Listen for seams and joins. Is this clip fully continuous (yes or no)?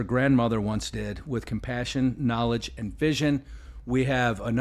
yes